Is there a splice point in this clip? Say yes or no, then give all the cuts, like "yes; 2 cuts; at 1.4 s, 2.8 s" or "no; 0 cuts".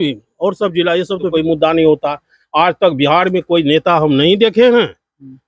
yes; 1 cut; at 1.3 s